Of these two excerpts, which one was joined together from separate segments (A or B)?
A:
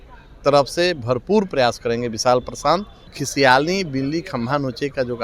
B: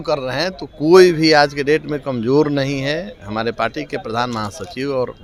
A